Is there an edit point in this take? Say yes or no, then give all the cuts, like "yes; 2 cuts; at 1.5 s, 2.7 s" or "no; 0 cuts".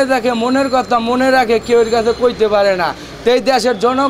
no; 0 cuts